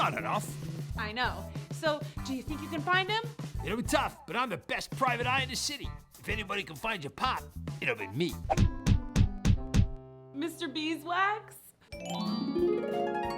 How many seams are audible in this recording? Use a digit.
1